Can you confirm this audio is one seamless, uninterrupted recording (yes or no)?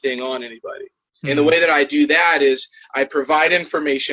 yes